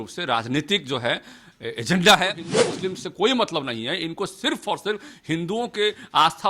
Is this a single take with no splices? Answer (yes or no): no